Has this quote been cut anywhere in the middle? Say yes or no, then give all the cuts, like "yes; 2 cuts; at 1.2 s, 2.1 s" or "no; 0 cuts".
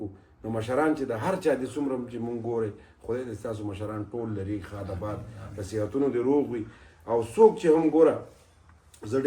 no; 0 cuts